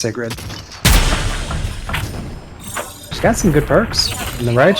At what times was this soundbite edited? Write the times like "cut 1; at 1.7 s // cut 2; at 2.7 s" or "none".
cut 1; at 3.1 s